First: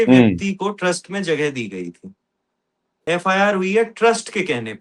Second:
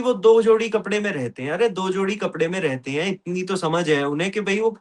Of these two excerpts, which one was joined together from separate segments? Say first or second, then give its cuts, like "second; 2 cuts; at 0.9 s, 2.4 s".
first; 1 cut; at 2.9 s